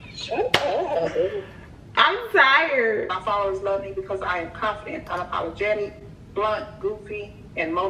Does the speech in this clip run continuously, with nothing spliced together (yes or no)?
no